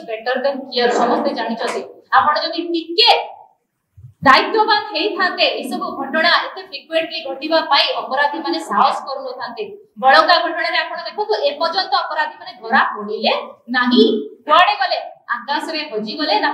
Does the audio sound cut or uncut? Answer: uncut